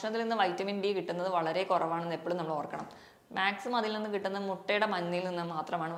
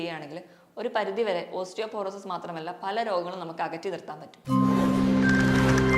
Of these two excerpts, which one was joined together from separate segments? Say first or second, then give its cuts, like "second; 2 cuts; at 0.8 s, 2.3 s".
second; 1 cut; at 4.3 s